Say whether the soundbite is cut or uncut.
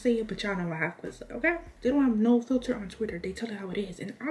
cut